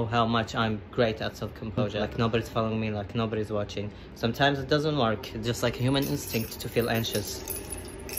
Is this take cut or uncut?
cut